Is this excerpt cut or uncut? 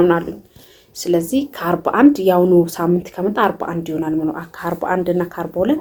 uncut